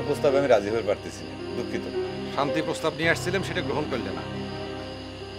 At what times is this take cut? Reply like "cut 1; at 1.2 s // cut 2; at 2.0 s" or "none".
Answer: none